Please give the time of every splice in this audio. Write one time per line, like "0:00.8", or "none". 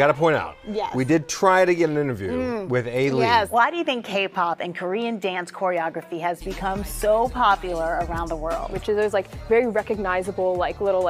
0:03.5
0:08.7